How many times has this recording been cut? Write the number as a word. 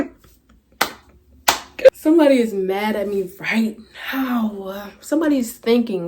one